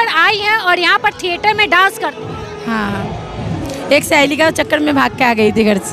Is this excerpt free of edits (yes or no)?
yes